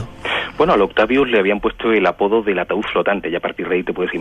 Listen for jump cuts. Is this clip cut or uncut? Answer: uncut